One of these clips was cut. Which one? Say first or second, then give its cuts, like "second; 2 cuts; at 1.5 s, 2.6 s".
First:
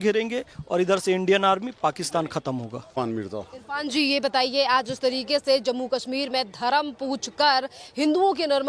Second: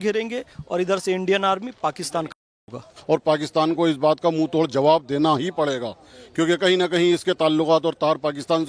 second; 1 cut; at 2.9 s